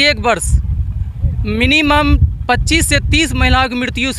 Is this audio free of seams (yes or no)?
yes